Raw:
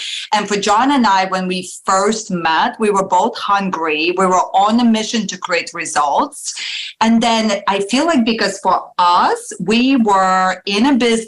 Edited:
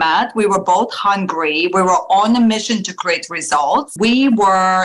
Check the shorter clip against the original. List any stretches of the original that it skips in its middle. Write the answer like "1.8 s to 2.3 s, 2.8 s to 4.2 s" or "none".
6.3 s to 9.6 s